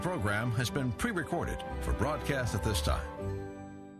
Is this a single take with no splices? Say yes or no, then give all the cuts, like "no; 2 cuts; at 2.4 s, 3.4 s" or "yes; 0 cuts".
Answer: yes; 0 cuts